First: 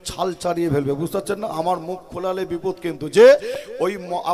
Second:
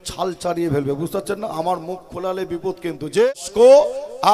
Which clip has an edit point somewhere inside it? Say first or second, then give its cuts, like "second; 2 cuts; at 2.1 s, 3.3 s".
second; 1 cut; at 3.2 s